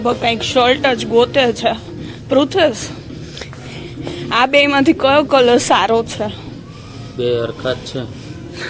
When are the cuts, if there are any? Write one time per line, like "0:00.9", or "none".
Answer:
none

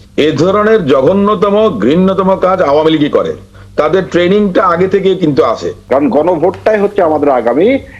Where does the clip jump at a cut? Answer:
0:05.7

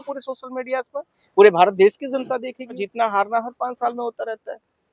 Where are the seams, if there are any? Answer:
0:02.8

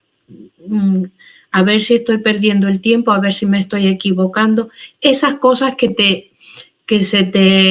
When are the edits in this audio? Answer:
none

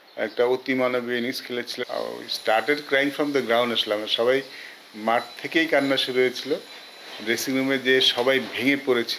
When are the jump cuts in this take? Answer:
0:01.8

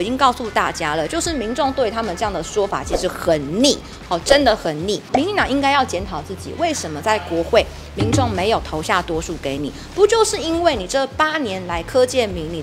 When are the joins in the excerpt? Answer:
0:05.0

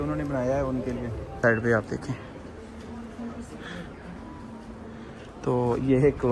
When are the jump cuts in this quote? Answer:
0:01.4

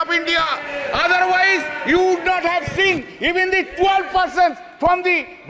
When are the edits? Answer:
none

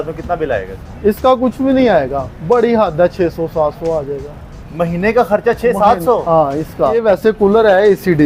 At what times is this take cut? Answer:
0:07.0

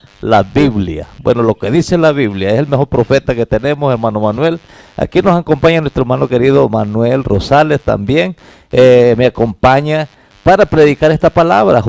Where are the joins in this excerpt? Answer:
0:05.3

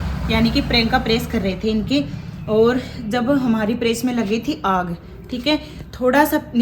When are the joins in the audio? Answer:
none

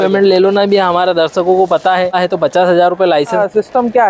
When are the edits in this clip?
0:02.1
0:03.4

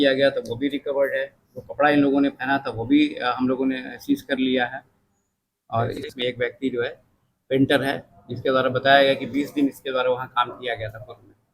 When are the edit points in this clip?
0:06.0

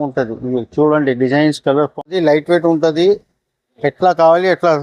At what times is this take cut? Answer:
0:02.1

